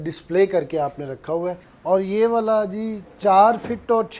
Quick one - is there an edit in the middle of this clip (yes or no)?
yes